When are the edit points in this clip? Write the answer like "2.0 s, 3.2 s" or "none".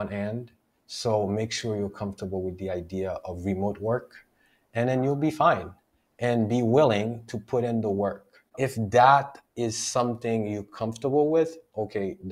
8.5 s